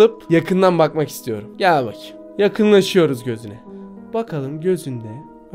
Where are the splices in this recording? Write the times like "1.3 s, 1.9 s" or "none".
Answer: 1.4 s